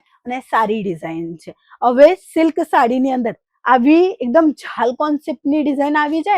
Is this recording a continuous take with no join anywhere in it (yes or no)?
yes